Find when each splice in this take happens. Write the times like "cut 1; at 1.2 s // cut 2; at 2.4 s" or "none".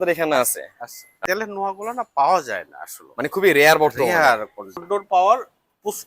cut 1; at 1.2 s // cut 2; at 4.8 s